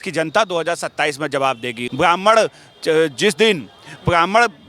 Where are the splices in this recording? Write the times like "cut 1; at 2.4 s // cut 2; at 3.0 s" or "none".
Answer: cut 1; at 1.8 s

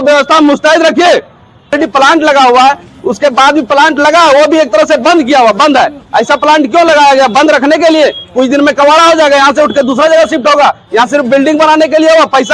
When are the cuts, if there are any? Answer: cut 1; at 1.7 s

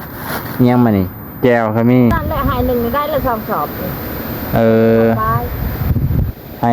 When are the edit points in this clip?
cut 1; at 2.1 s

